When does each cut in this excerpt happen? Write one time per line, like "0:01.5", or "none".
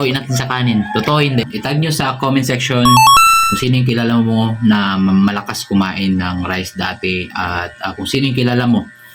0:01.4